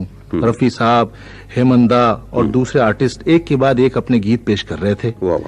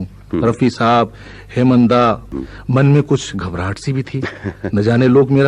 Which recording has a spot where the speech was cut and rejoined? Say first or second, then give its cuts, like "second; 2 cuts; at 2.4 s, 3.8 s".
second; 1 cut; at 2.2 s